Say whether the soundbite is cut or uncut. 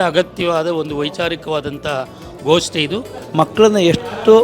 cut